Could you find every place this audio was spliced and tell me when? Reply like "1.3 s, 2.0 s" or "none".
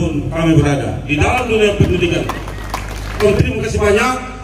3.2 s

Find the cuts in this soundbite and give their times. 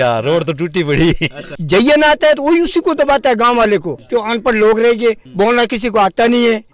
1.5 s, 4.0 s

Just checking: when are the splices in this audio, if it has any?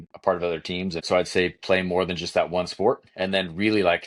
1.0 s

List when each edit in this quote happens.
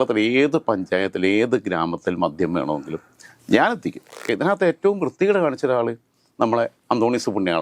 4.3 s

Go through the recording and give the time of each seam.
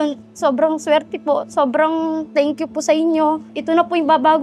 3.5 s

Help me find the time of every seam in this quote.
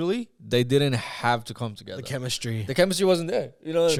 none

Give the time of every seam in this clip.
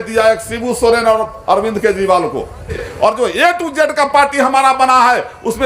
2.9 s

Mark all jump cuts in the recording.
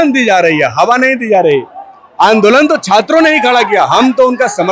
none

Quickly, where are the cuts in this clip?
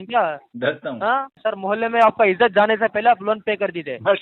1.4 s

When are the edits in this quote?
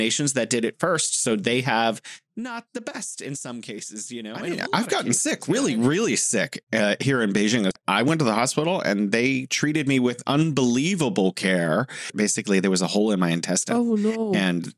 4.5 s, 7.8 s, 12.1 s

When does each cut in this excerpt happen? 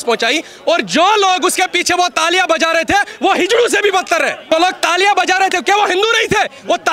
4.4 s

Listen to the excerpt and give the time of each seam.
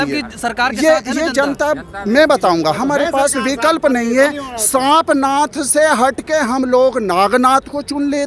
none

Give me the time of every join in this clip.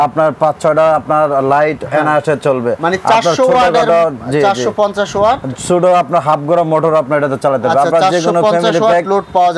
none

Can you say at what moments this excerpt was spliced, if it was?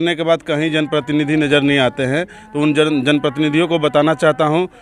none

